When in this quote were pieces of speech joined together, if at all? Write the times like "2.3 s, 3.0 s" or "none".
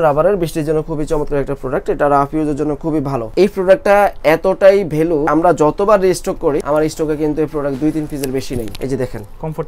3.3 s, 5.3 s, 6.6 s, 8.7 s